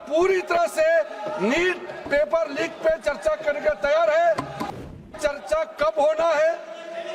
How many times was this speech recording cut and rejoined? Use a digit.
1